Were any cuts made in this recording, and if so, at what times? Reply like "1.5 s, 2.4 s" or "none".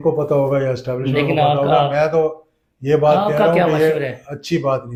none